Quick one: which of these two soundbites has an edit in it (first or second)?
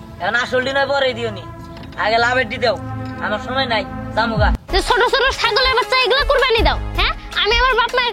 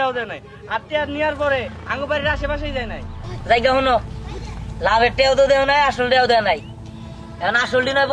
first